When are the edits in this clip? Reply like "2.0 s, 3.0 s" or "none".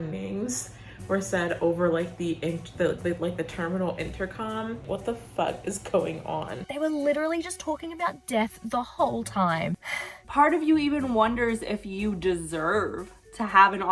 4.8 s, 6.6 s, 10.0 s